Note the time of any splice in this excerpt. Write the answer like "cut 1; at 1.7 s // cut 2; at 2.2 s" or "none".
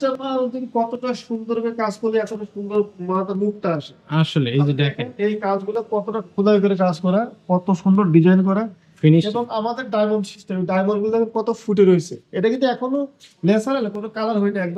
none